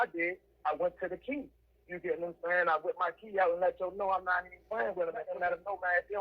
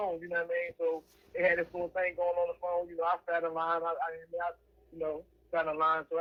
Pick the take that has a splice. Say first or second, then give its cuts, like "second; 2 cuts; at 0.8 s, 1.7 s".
first; 1 cut; at 5.3 s